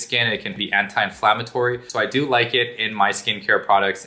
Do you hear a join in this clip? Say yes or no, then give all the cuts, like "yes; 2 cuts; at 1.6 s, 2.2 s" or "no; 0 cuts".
no; 0 cuts